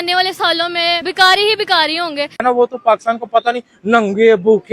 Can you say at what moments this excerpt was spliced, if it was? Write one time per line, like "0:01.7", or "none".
0:01.1
0:02.3